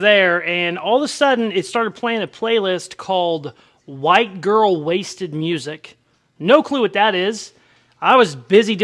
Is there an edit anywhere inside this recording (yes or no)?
no